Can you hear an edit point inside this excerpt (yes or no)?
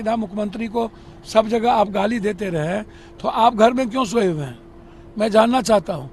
no